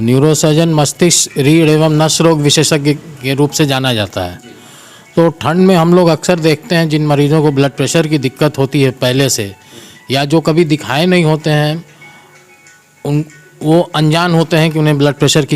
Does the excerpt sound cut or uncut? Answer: uncut